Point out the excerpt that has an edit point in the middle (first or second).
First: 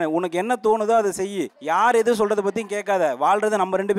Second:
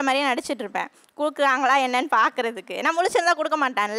first